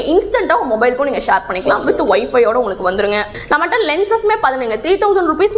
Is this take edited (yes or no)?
yes